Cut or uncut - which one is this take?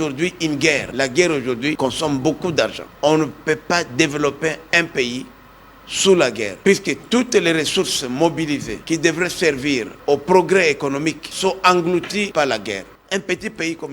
cut